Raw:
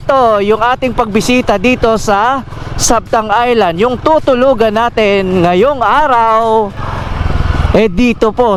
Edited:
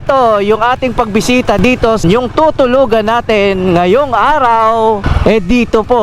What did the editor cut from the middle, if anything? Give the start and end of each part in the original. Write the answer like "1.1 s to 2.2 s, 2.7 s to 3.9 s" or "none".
2.0 s to 3.7 s, 6.8 s to 7.6 s